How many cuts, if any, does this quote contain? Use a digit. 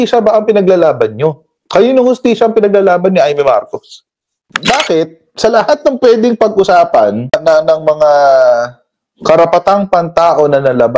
1